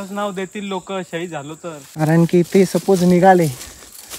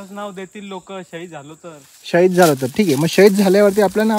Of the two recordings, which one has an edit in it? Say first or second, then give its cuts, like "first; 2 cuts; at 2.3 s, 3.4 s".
first; 1 cut; at 1.8 s